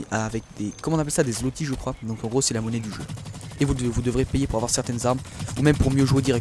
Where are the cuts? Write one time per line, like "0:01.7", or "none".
none